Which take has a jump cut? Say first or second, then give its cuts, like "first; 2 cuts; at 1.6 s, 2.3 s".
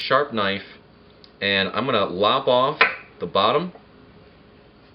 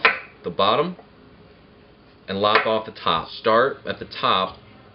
second; 1 cut; at 3.3 s